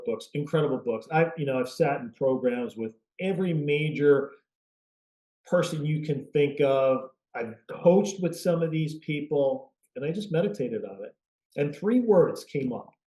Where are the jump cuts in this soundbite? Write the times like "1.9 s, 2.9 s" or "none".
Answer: 9.9 s